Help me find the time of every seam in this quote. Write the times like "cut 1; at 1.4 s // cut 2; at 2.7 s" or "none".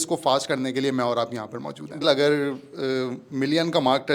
cut 1; at 2.0 s